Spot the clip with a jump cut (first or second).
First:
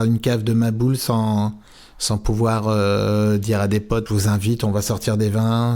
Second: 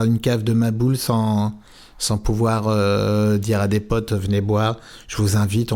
first